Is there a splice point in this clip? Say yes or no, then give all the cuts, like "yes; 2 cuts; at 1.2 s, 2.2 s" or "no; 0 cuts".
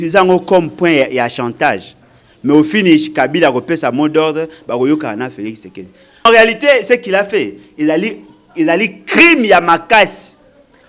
yes; 1 cut; at 6.2 s